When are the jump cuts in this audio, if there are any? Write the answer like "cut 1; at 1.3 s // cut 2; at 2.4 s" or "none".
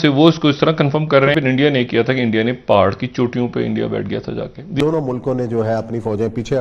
cut 1; at 1.3 s // cut 2; at 4.8 s